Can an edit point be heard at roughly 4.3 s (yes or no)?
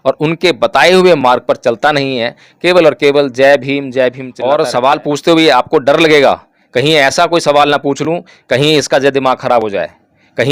yes